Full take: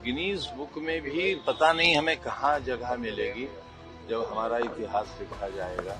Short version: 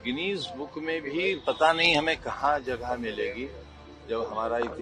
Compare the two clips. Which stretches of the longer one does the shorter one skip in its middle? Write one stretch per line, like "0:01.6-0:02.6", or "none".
none